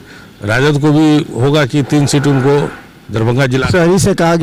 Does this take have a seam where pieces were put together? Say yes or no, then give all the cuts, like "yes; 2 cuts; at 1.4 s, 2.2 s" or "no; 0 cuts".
no; 0 cuts